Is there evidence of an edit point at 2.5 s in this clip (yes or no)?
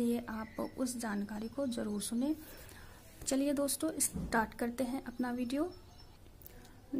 no